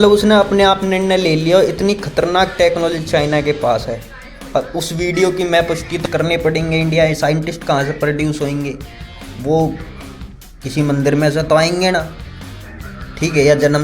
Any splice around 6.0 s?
yes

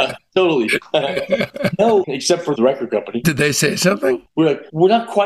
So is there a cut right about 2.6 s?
yes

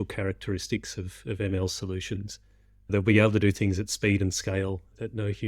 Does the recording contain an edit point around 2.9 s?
yes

